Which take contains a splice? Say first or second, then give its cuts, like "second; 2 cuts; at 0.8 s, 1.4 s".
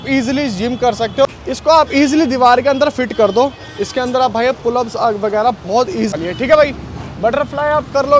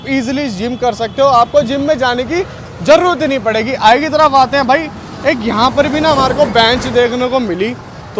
first; 2 cuts; at 1.2 s, 6.1 s